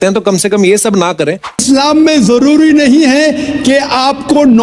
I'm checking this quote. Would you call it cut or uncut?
cut